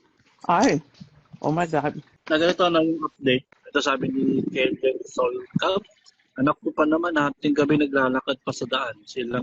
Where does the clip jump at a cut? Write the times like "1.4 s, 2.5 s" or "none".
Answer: 2.1 s, 3.5 s